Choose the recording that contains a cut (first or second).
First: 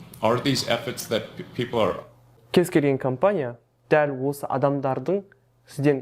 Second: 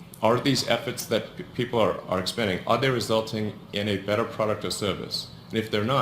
second